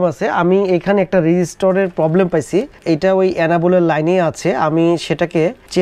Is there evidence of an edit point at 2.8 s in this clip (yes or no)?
no